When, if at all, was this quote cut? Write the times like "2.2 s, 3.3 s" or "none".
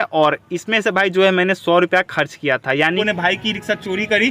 3.0 s